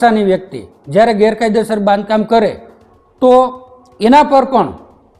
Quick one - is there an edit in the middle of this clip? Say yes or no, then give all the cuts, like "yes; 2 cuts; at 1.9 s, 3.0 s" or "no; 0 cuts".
no; 0 cuts